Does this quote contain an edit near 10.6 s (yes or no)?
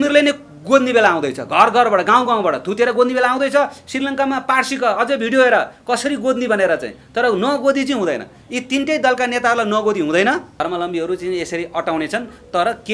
yes